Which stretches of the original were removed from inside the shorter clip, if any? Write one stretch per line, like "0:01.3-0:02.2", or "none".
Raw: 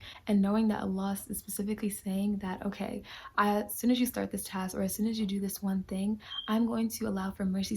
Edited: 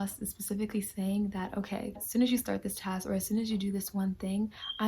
0:03.1-0:03.7